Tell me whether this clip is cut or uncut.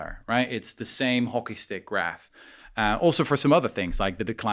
uncut